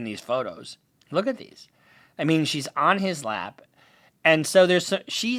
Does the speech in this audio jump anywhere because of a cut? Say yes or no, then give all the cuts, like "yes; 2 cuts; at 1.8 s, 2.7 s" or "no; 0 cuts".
no; 0 cuts